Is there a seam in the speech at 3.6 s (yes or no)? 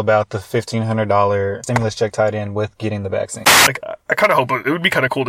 yes